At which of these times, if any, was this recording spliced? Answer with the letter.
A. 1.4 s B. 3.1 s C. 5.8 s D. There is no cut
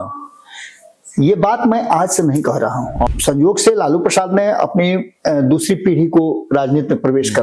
B